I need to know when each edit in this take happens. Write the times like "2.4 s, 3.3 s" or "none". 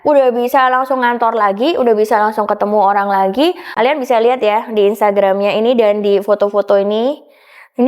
3.7 s